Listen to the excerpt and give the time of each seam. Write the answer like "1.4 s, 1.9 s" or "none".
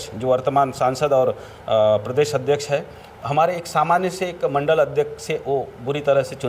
none

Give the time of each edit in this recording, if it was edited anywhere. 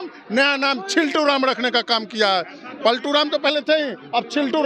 none

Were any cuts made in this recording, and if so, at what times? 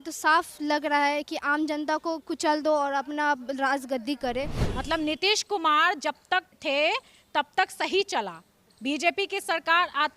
4.6 s, 6.5 s

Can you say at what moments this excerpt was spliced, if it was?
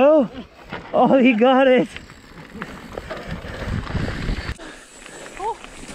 4.6 s

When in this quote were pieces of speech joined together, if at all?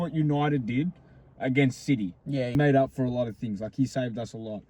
2.6 s

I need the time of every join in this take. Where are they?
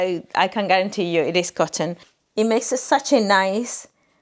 2.1 s

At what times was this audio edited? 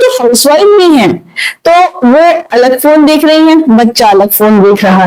none

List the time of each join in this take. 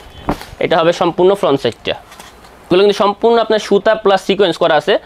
2.7 s

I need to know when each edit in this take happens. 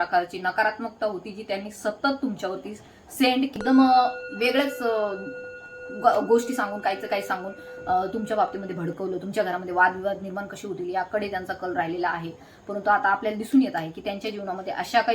3.6 s

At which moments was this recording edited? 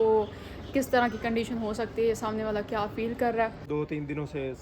3.6 s

